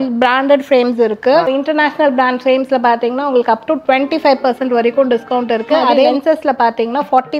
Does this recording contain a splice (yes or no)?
yes